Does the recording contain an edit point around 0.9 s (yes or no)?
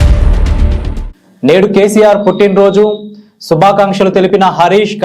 yes